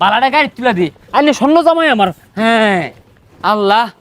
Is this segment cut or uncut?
uncut